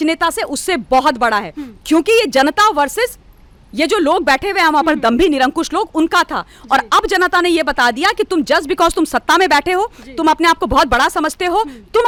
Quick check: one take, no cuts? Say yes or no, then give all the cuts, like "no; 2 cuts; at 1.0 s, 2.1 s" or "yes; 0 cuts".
yes; 0 cuts